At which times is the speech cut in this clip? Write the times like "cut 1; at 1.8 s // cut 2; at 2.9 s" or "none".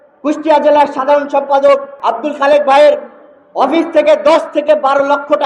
cut 1; at 1.9 s